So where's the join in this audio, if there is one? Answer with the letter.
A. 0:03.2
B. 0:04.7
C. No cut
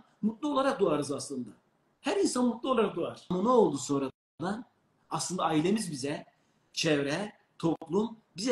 A